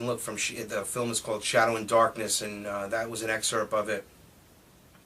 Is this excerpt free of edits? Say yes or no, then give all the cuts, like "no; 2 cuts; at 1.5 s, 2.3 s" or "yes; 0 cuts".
no; 1 cut; at 2.5 s